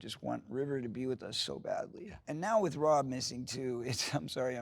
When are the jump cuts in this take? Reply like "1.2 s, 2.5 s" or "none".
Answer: 2.1 s

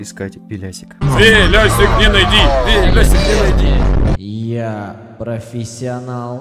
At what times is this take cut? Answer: 4.1 s

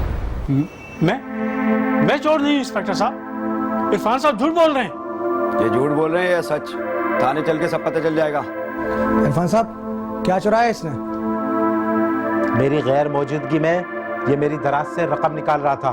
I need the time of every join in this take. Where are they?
none

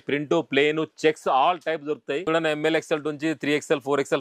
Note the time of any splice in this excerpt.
2.2 s

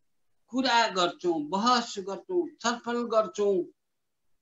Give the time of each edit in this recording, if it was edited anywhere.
none

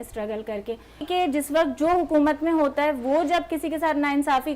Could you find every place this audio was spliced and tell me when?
1.0 s

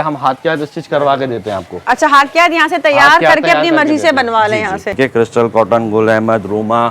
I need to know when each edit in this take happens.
4.9 s

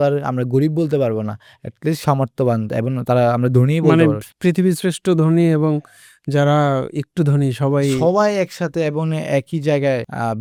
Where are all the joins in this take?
none

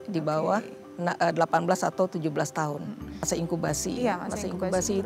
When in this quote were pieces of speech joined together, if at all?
3.3 s

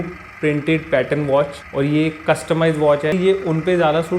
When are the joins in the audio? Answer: 3.1 s

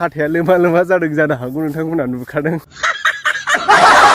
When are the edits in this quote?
3.1 s

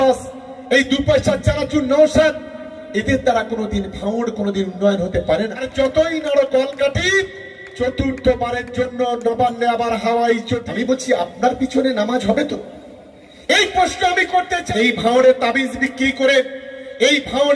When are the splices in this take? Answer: 5.6 s, 10.6 s, 14.6 s

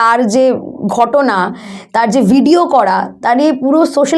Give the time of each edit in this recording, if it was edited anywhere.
none

